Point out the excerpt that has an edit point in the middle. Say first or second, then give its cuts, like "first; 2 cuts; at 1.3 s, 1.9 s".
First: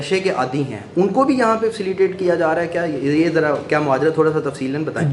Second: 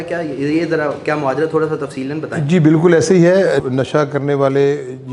second; 1 cut; at 3.6 s